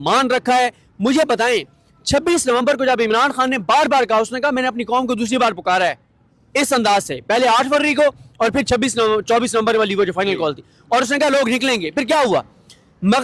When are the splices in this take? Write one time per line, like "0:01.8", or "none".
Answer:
none